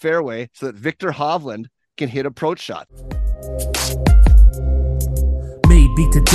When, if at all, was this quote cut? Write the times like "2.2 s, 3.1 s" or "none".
2.9 s